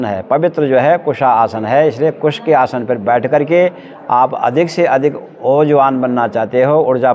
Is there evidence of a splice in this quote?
no; 0 cuts

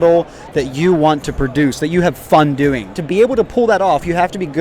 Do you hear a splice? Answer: yes; 1 cut; at 2.9 s

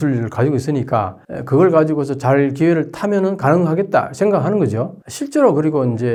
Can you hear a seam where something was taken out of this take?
no; 0 cuts

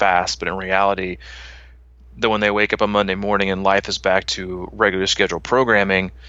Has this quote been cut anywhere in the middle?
no; 0 cuts

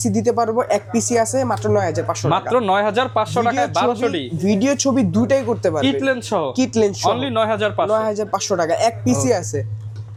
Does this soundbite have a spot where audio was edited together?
no; 0 cuts

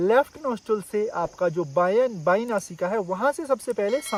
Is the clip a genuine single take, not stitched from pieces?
yes; 0 cuts

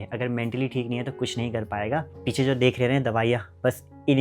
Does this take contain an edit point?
yes; 1 cut; at 2.2 s

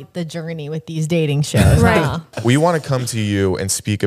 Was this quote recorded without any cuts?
no; 1 cut; at 2.3 s

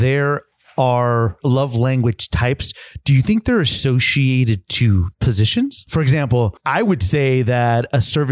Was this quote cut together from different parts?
yes; 3 cuts; at 1.4 s, 5.4 s, 6.6 s

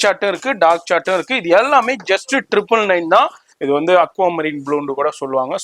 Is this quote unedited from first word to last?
no; 1 cut; at 3.5 s

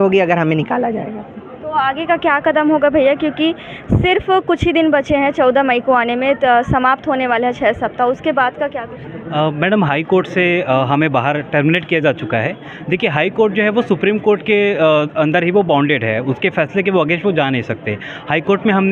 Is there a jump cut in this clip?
no; 0 cuts

